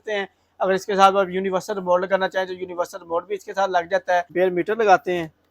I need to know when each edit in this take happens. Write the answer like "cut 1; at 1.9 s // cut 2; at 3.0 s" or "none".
cut 1; at 4.3 s